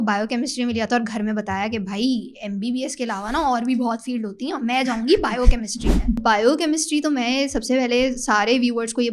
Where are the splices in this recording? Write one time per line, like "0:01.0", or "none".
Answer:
0:06.2